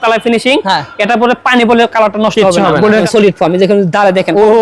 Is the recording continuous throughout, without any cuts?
no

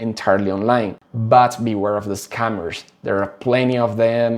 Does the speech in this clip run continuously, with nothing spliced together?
yes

